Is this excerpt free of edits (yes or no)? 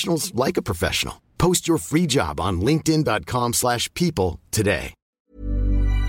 no